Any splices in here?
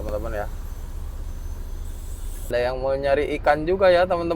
yes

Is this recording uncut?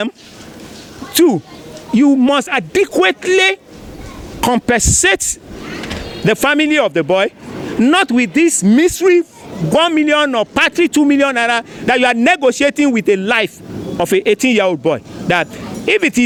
yes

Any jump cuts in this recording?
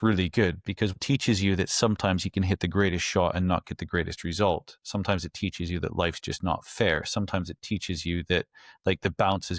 yes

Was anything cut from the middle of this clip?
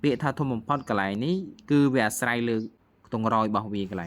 yes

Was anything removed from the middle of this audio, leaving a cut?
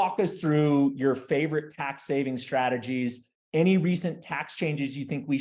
no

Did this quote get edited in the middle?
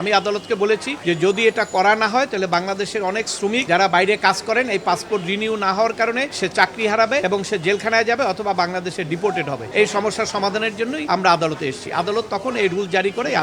yes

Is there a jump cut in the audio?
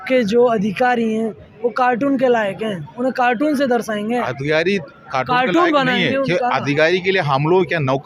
no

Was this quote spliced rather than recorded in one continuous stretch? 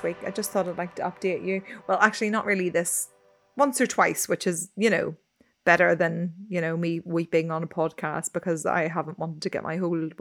no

